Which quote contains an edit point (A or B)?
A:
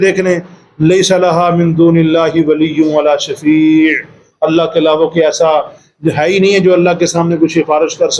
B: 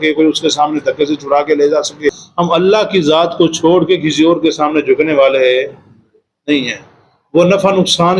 B